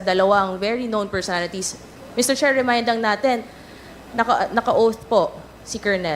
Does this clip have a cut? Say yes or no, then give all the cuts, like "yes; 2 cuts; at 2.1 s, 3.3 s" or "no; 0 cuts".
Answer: no; 0 cuts